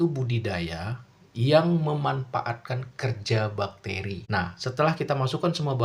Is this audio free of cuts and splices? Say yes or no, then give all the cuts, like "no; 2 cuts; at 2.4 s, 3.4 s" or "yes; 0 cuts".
no; 1 cut; at 4.2 s